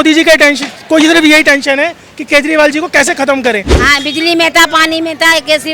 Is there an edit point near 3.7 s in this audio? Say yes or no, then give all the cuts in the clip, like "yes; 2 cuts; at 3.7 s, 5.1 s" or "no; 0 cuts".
yes; 1 cut; at 3.7 s